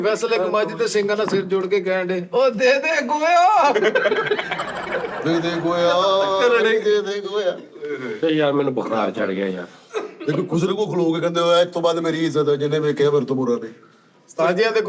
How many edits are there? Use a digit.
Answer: 0